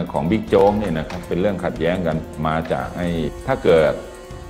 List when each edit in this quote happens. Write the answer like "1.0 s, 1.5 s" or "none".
3.3 s